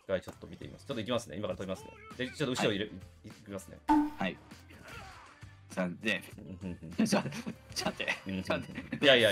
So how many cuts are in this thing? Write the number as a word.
zero